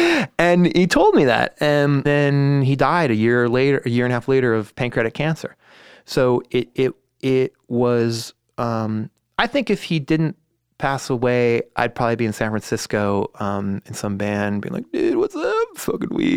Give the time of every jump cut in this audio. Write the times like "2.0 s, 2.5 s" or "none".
2.0 s